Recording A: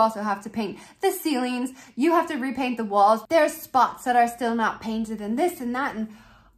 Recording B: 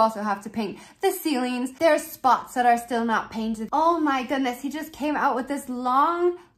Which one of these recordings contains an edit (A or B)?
B